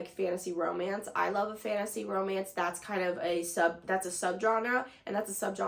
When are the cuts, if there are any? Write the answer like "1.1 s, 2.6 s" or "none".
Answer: none